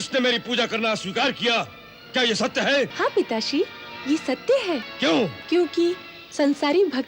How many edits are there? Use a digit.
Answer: 2